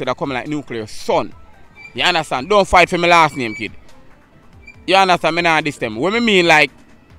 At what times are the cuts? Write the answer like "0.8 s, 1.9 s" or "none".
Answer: none